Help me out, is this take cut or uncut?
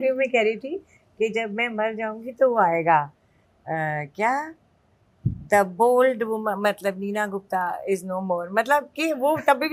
uncut